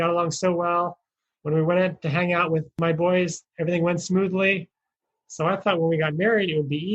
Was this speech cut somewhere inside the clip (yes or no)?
yes